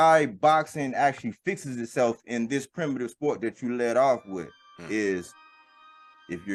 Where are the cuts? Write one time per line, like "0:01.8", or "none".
none